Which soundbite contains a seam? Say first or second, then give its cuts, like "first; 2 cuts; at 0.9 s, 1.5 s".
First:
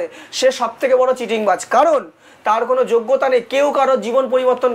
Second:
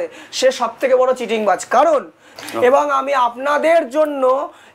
second; 1 cut; at 2.4 s